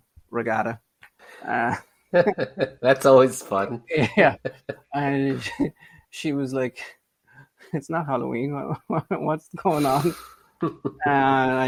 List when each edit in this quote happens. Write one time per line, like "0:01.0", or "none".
none